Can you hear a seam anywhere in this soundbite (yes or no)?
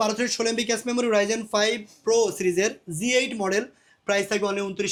no